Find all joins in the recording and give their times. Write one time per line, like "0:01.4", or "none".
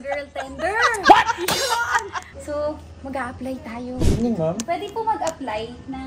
0:03.9